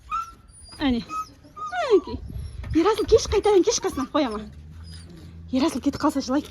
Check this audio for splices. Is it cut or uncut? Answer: uncut